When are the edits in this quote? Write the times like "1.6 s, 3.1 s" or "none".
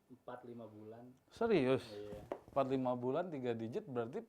none